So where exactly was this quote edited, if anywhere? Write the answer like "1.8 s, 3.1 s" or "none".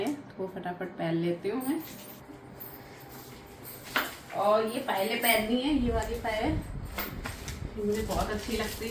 none